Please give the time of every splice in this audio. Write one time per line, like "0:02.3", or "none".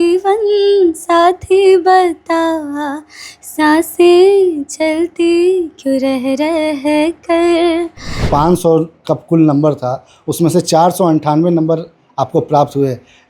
0:08.2